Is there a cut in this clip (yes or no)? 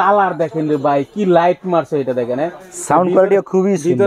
no